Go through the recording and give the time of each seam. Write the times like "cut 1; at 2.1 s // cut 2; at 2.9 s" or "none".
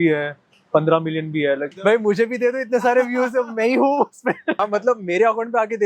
cut 1; at 1.7 s // cut 2; at 4.6 s